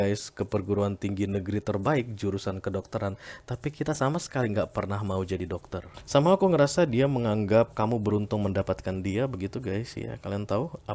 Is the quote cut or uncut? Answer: cut